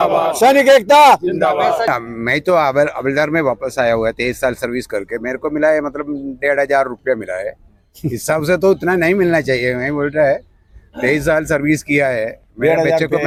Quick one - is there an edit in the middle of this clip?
no; 0 cuts

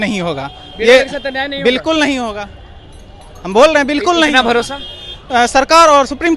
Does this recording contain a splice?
no; 0 cuts

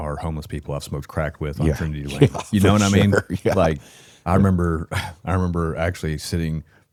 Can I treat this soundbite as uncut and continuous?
yes; 0 cuts

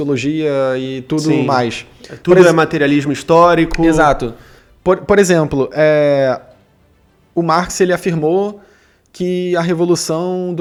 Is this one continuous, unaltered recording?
yes; 0 cuts

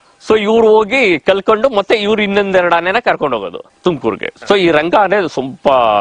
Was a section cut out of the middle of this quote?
yes; 1 cut; at 4.3 s

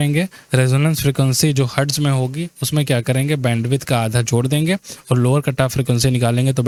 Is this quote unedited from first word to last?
yes; 0 cuts

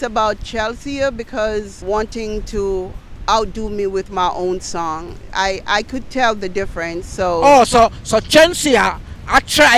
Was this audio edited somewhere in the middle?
yes; 1 cut; at 1.8 s

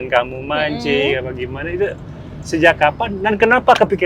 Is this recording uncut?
yes; 0 cuts

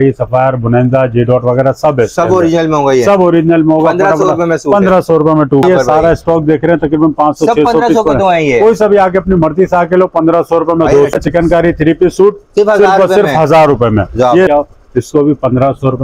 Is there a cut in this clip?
yes; 3 cuts; at 5.6 s, 11.1 s, 14.5 s

